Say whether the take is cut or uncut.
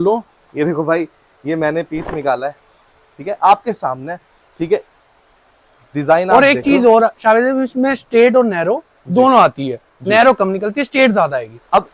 uncut